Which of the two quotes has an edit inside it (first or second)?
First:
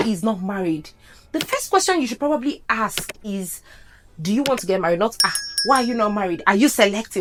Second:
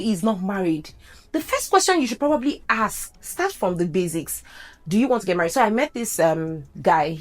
second